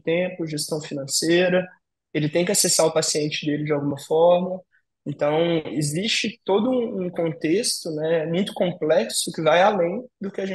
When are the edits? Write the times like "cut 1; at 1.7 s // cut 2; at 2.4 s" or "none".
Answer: none